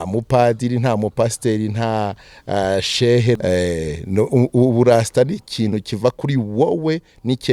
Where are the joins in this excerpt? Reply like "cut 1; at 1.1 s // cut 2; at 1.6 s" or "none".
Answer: cut 1; at 3.4 s